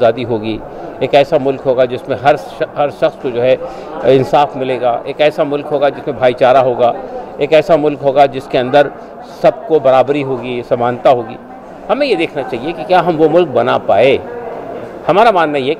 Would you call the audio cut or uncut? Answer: uncut